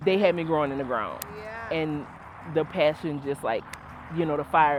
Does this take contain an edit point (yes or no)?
no